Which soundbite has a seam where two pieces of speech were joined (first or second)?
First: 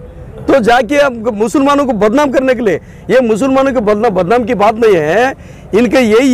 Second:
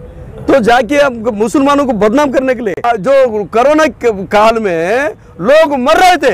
second